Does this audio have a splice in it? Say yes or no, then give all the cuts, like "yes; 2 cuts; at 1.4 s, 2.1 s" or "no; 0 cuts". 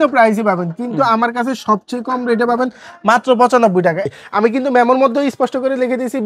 yes; 1 cut; at 4.0 s